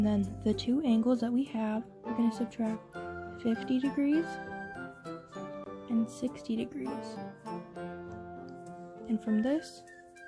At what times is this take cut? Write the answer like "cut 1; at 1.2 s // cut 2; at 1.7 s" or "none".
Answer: cut 1; at 7.4 s // cut 2; at 8.6 s // cut 3; at 9.6 s